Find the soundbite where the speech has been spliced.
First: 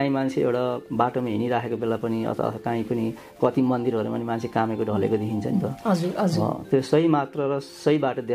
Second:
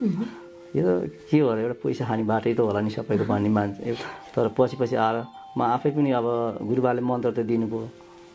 second; 1 cut; at 3.9 s

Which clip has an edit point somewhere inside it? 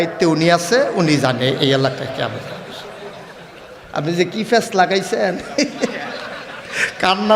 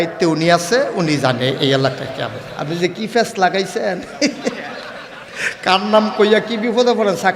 second; 1 cut; at 2.5 s

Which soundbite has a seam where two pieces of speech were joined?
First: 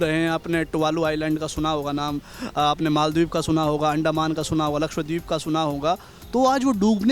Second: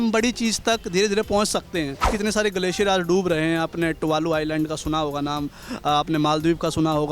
second; 1 cut; at 2.1 s

